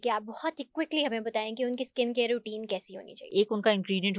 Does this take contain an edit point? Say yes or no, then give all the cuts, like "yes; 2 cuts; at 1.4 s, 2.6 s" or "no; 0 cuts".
yes; 1 cut; at 3.2 s